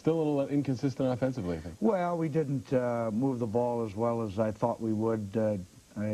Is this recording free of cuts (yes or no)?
no